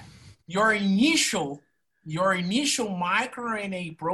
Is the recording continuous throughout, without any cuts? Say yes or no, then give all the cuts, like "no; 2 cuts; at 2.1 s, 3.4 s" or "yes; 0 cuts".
yes; 0 cuts